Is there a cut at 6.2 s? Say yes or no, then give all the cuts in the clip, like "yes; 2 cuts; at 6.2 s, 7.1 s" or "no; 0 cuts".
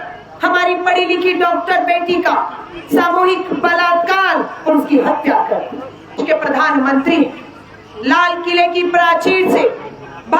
yes; 1 cut; at 6.2 s